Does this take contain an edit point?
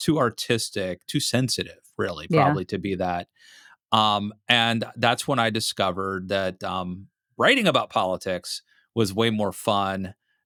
no; 0 cuts

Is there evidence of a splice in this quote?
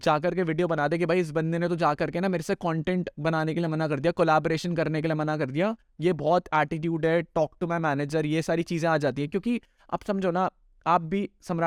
no; 0 cuts

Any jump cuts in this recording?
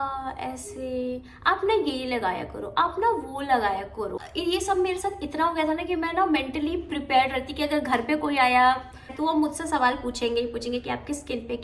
yes; 2 cuts; at 4.2 s, 9.2 s

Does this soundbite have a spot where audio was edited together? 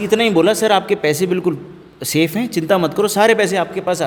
no; 0 cuts

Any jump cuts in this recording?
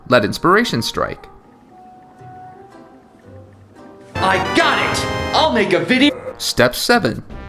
no; 0 cuts

